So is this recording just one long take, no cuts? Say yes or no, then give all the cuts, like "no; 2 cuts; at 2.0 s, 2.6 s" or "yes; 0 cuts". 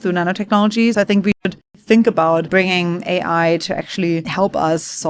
no; 3 cuts; at 1.2 s, 2.5 s, 4.3 s